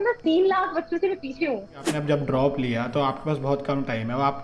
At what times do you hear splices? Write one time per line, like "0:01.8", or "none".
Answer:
0:01.9